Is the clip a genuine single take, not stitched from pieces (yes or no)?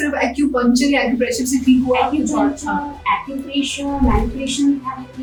yes